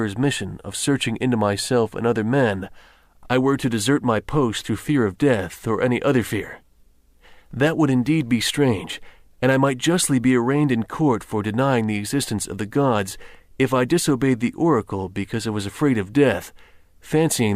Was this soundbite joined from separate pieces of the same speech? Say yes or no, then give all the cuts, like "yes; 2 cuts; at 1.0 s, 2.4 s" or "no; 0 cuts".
yes; 1 cut; at 2.8 s